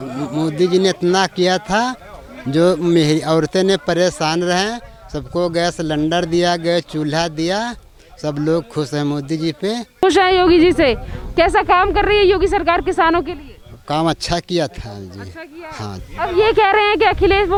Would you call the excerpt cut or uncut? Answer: uncut